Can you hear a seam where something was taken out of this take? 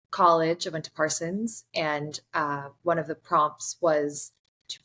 no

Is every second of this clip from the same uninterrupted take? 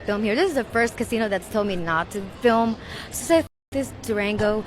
yes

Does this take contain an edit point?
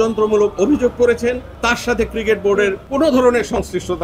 yes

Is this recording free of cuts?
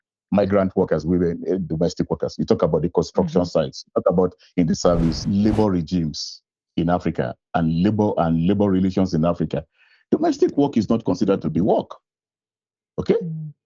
no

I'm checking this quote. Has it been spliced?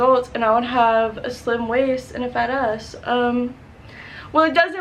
no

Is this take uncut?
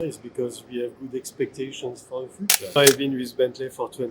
no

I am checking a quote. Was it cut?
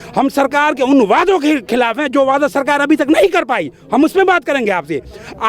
no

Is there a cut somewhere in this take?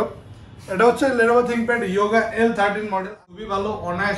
yes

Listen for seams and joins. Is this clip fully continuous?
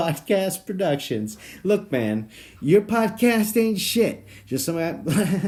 yes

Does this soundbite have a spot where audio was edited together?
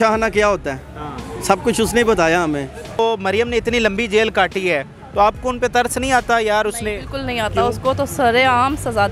yes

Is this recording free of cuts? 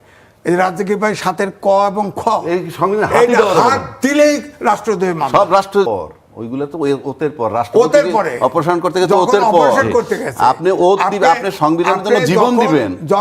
no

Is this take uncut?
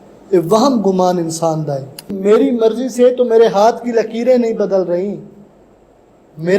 no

